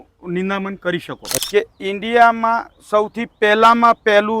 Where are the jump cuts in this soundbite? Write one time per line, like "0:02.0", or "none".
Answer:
0:01.3